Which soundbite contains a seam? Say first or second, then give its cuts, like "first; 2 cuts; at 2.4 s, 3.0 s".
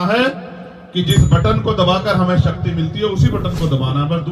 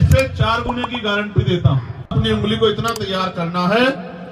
second; 1 cut; at 2.1 s